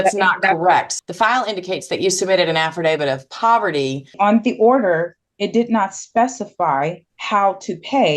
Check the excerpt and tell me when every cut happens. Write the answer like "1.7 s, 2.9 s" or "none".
0.9 s, 4.1 s, 7.1 s